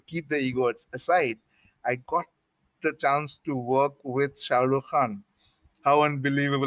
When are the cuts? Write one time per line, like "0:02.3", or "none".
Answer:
none